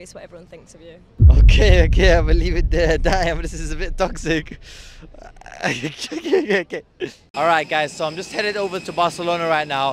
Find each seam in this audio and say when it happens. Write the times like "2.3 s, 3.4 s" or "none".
none